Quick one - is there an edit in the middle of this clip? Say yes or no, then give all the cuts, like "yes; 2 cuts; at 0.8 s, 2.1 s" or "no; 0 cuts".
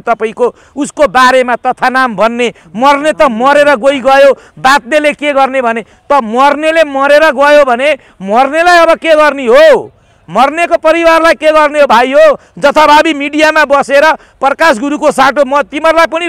no; 0 cuts